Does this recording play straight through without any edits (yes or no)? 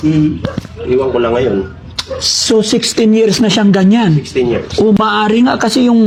yes